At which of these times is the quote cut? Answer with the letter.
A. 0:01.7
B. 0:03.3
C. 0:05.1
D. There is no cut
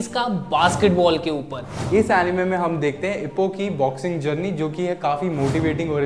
A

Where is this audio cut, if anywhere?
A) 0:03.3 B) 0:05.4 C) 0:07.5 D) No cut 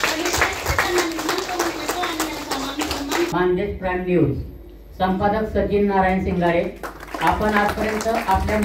A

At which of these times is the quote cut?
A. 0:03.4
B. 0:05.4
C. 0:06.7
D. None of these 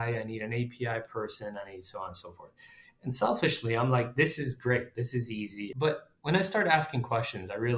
B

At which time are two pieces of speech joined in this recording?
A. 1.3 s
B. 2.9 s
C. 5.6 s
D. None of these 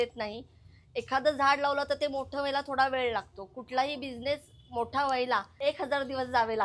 C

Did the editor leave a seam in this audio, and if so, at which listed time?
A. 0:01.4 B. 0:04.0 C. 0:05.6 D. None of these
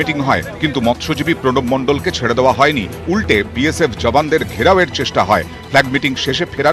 D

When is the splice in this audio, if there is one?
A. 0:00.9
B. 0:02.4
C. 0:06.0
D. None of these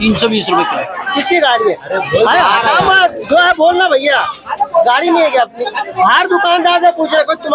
A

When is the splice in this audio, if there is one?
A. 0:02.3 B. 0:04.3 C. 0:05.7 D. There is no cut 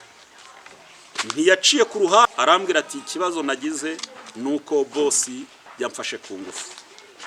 A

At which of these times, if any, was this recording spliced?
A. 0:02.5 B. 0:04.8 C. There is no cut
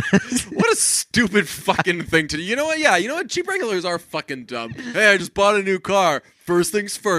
B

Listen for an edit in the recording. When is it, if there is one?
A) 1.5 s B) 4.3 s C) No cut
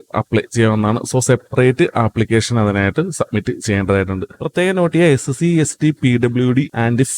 B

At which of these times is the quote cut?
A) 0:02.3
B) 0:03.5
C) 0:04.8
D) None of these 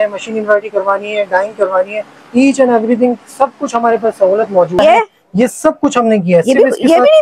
C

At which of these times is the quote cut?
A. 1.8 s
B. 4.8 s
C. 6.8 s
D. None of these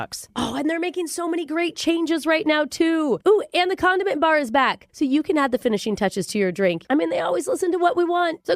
C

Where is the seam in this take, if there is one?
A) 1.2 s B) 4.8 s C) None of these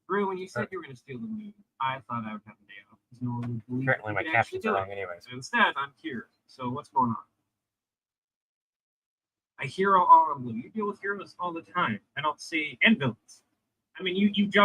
A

